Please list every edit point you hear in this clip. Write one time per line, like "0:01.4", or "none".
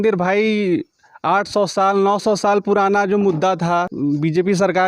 0:03.9